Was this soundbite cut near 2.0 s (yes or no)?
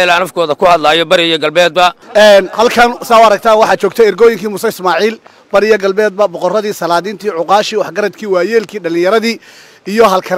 yes